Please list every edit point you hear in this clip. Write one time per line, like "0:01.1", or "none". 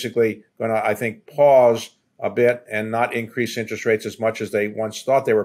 none